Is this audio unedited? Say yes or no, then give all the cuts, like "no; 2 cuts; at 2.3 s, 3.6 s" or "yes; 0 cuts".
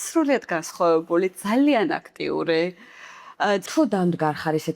no; 1 cut; at 3.6 s